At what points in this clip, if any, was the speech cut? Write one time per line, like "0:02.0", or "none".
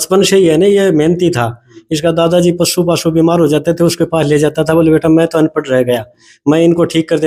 none

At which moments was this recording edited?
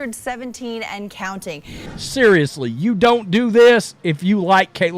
0:01.9

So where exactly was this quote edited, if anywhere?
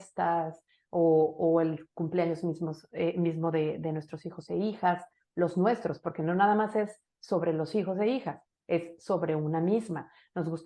none

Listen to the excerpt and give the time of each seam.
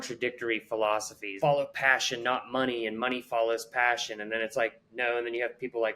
0:01.4

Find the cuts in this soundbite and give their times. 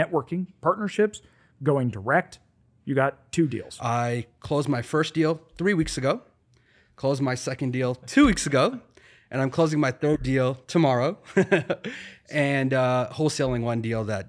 0:03.7

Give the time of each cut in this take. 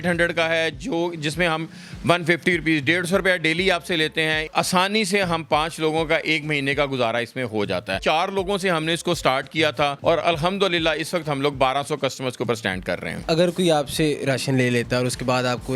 0:04.5
0:08.0
0:10.0
0:13.2

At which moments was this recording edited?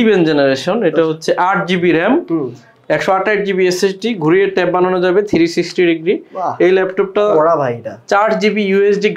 none

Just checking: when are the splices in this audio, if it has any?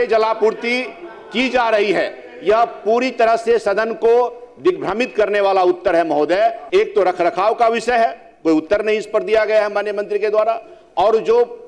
0:06.6

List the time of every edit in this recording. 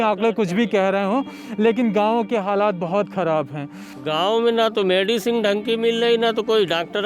0:03.9

